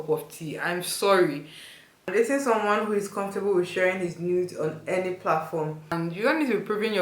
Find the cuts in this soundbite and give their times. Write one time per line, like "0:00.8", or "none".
0:02.0
0:05.9